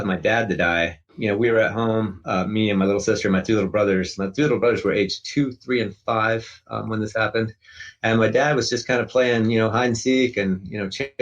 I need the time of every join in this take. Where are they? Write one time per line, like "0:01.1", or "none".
0:01.1